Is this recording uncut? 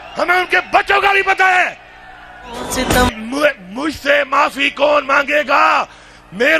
no; 1 cut; at 3.1 s

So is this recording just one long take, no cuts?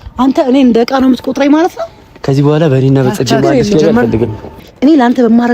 no; 1 cut; at 4.4 s

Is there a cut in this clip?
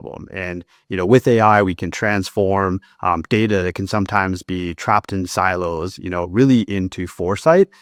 no; 0 cuts

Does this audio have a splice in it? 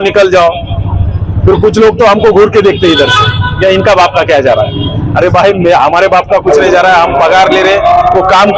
no; 0 cuts

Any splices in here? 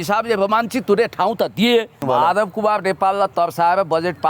yes; 1 cut; at 2.0 s

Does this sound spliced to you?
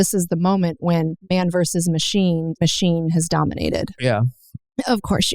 yes; 3 cuts; at 1.2 s, 2.5 s, 4.0 s

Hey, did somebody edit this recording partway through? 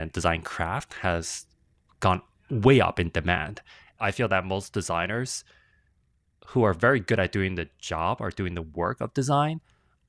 yes; 1 cut; at 4.0 s

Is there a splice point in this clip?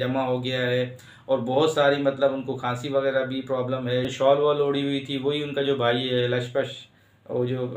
yes; 1 cut; at 4.1 s

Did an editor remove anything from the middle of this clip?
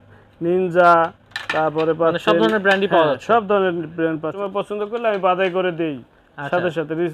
yes; 1 cut; at 4.3 s

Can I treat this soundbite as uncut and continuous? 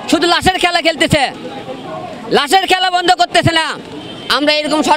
yes; 0 cuts

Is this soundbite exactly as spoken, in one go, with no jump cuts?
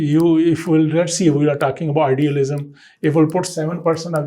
yes; 0 cuts

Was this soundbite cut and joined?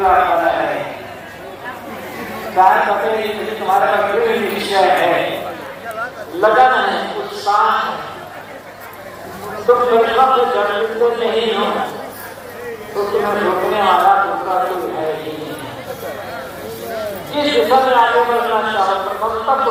no; 0 cuts

